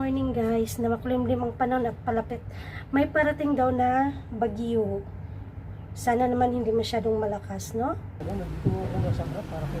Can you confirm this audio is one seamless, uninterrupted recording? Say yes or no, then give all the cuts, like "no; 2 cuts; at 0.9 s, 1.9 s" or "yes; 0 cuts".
no; 1 cut; at 8.1 s